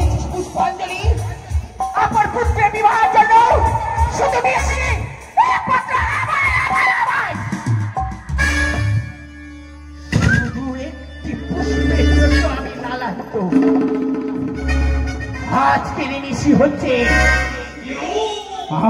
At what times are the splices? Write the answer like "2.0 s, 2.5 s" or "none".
none

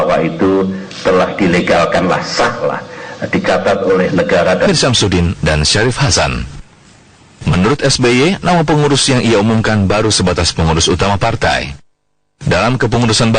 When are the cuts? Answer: none

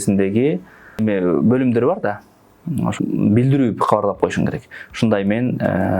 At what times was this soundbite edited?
1.0 s, 3.0 s

